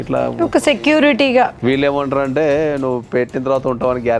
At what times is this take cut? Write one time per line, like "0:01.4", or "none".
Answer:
0:01.5